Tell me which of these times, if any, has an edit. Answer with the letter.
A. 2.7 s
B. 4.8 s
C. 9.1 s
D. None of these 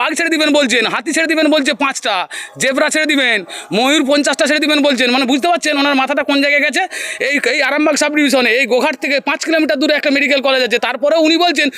D